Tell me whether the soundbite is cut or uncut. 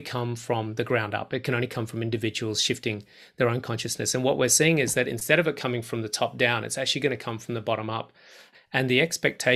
cut